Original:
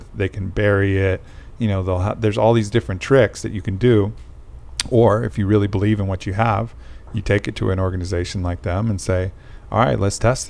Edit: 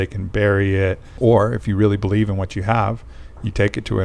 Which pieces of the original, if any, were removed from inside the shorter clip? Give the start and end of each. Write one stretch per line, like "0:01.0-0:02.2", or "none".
0:01.3-0:04.8